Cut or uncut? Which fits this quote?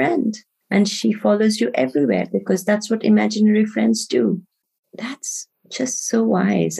cut